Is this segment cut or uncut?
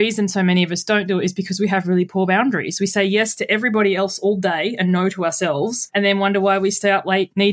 uncut